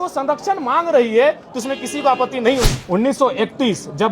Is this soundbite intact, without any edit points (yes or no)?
no